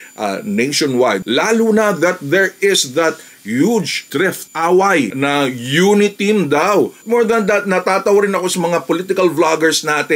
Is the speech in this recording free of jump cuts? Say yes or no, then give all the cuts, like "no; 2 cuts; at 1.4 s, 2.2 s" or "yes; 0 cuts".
no; 2 cuts; at 1.2 s, 7.0 s